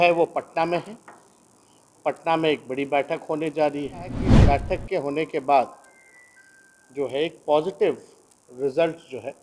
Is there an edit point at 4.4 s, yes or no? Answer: yes